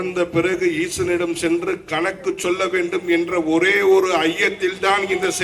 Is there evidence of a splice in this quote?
no; 0 cuts

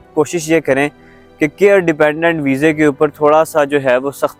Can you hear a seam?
no; 0 cuts

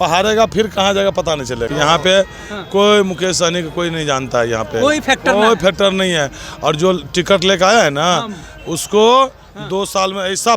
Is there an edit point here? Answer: yes; 1 cut; at 1.7 s

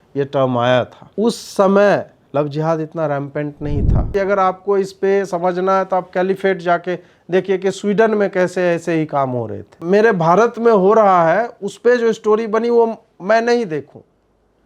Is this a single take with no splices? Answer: no; 4 cuts; at 1.0 s, 2.2 s, 4.1 s, 9.8 s

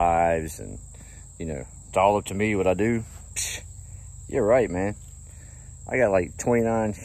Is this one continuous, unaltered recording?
yes; 0 cuts

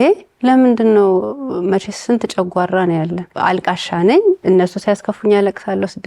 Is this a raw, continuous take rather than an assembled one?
no; 1 cut; at 3.3 s

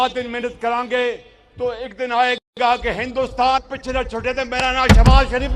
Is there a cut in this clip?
no; 0 cuts

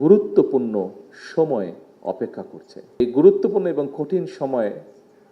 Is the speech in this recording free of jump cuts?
no; 1 cut; at 3.0 s

